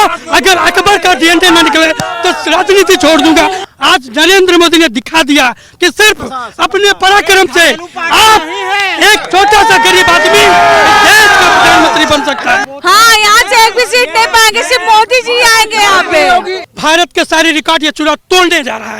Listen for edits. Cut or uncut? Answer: cut